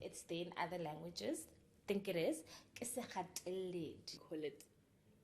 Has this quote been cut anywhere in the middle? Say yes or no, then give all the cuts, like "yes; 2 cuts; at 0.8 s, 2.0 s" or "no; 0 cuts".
yes; 1 cut; at 4.2 s